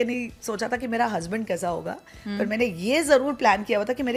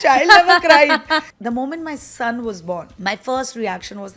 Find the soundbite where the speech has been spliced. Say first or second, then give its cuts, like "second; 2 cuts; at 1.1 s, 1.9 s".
second; 2 cuts; at 1.3 s, 2.9 s